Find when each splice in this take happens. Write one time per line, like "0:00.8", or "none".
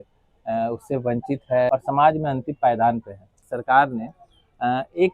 0:01.7
0:03.5